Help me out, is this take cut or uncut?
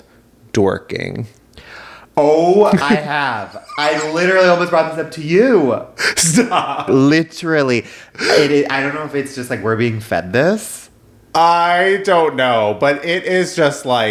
uncut